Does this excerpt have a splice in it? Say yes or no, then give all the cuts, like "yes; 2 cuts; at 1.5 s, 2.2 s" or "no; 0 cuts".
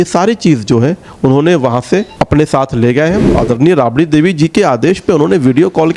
yes; 2 cuts; at 2.1 s, 3.3 s